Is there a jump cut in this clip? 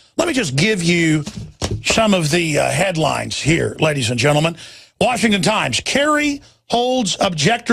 yes; 1 cut; at 2.1 s

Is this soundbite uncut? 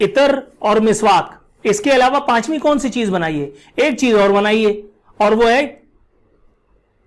yes; 0 cuts

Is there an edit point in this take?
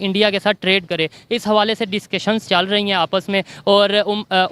no; 0 cuts

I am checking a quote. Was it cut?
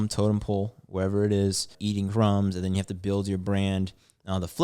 yes; 1 cut; at 1.7 s

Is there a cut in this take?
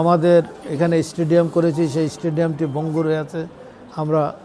no; 0 cuts

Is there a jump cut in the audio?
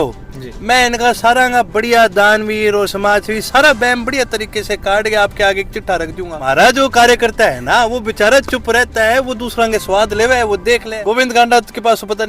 yes; 2 cuts; at 6.3 s, 10.9 s

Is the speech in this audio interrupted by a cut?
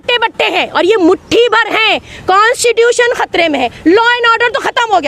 yes; 1 cut; at 2.1 s

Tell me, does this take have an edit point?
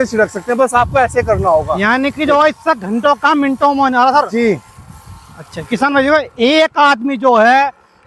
no; 0 cuts

